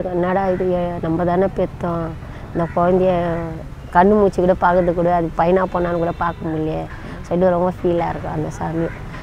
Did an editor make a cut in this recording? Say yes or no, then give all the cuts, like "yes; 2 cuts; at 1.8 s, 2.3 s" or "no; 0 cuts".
no; 0 cuts